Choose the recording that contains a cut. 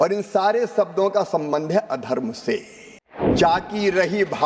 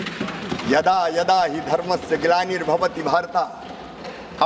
first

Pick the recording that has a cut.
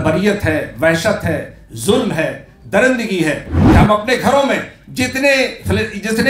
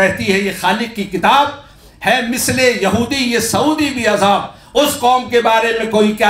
first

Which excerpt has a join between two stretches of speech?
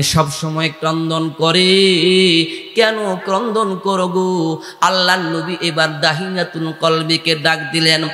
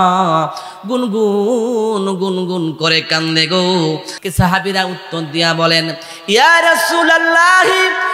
second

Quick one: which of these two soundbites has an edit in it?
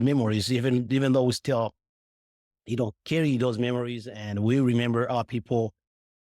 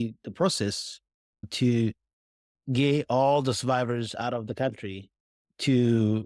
second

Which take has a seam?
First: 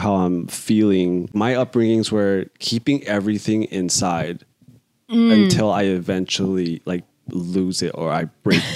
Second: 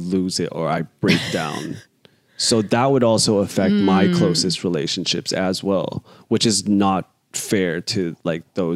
first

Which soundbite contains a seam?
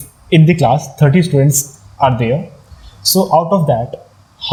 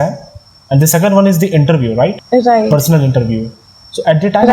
second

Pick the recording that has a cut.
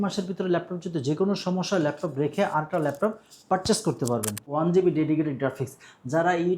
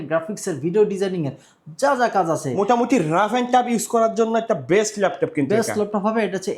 first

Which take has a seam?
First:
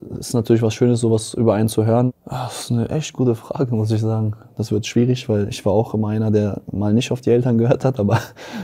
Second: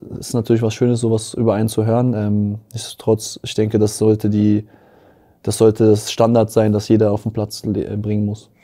first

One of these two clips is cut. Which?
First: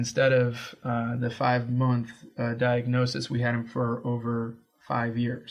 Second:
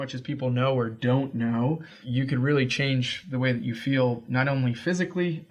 second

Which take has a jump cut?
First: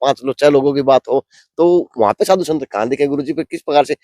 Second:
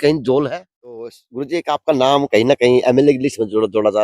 second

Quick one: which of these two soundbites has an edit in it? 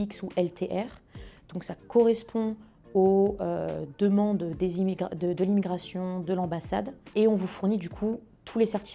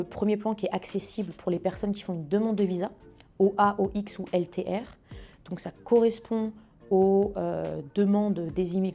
first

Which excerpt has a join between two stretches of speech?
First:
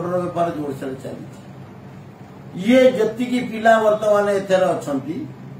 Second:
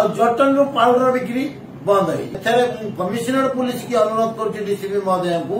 second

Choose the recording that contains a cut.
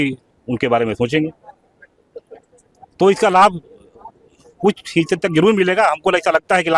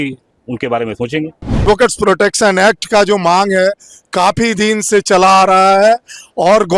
second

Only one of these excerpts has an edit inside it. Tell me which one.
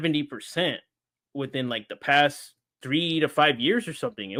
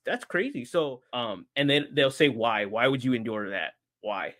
second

